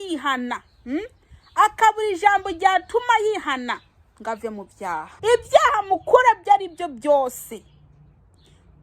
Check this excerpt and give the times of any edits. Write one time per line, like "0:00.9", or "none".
0:05.1

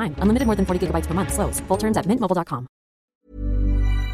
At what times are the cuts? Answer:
0:03.1

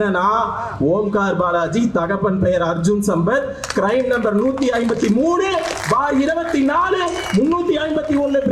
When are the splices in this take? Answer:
none

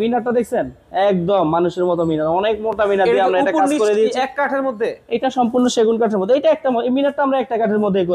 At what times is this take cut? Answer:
none

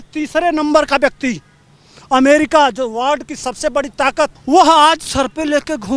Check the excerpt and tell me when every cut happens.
0:04.4

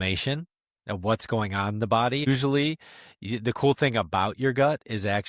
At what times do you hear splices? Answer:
0:02.3

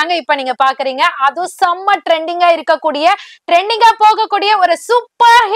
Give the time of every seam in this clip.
none

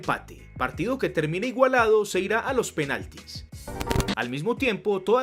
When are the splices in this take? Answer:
0:03.7

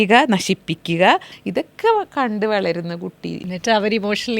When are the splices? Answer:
0:01.4

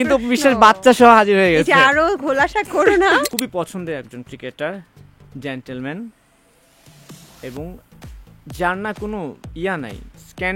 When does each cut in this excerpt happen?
0:03.3

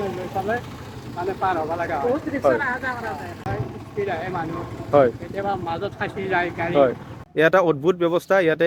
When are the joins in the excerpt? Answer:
0:03.5
0:07.2

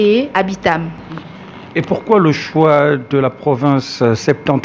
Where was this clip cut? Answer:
none

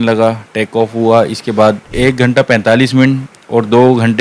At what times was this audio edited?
0:01.9

